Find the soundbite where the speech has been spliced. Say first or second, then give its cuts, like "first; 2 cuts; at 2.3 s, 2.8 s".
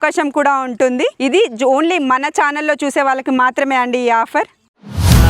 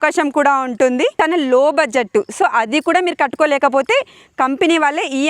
second; 1 cut; at 1.1 s